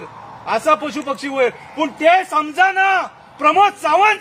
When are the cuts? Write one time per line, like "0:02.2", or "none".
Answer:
none